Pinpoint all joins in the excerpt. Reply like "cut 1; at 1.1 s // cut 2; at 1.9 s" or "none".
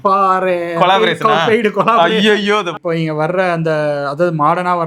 cut 1; at 2.7 s